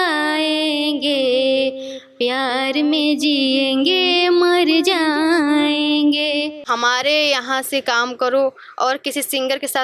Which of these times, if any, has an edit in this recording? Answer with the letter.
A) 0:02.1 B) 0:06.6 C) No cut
B